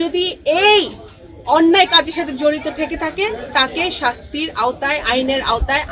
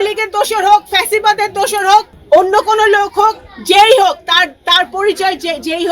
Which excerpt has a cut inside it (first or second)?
second